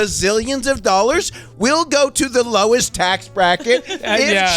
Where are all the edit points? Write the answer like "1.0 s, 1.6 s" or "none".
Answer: 2.9 s